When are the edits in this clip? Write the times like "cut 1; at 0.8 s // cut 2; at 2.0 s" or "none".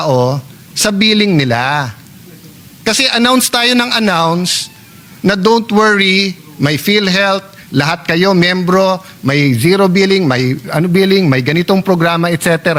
none